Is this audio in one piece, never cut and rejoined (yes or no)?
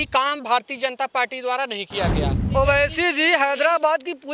no